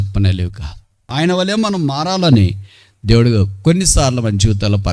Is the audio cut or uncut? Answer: cut